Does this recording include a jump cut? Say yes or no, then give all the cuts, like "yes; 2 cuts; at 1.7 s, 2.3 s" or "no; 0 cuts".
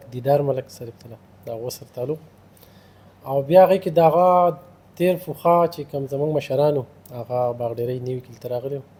no; 0 cuts